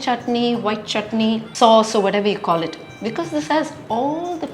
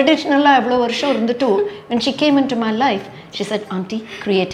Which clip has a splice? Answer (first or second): first